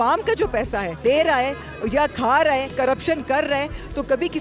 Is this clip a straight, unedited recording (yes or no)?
no